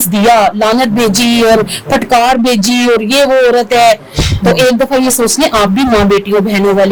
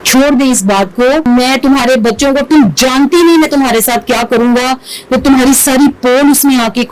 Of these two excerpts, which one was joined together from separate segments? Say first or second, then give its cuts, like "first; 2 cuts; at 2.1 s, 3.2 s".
second; 1 cut; at 1.3 s